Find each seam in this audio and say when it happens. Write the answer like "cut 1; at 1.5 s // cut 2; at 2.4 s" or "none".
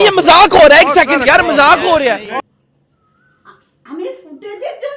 cut 1; at 2.4 s